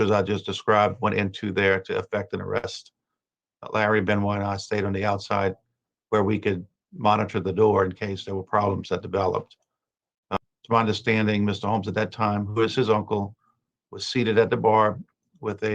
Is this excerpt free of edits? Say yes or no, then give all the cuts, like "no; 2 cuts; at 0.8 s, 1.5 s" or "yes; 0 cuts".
no; 1 cut; at 10.4 s